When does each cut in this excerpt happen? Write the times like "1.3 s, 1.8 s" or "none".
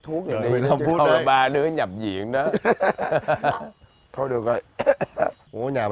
none